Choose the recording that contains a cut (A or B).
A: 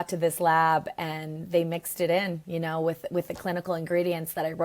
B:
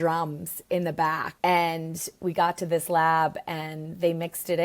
B